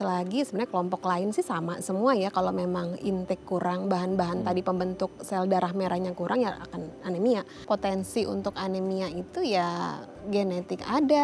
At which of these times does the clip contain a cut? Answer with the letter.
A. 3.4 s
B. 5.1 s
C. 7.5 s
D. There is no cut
C